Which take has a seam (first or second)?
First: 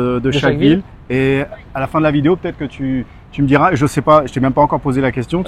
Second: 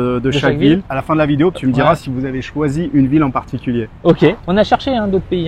second